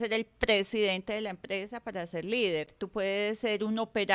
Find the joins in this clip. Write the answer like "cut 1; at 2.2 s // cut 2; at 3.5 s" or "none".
none